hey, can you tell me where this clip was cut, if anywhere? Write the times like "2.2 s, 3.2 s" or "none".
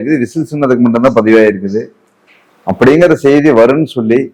none